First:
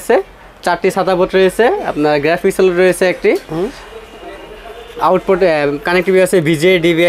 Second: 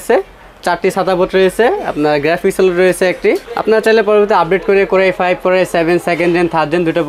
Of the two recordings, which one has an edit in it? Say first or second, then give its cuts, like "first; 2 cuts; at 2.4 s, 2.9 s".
second; 1 cut; at 3.5 s